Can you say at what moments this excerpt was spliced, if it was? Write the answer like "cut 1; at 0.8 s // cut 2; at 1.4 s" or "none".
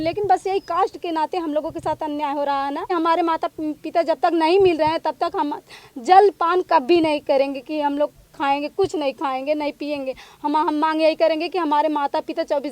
cut 1; at 2.9 s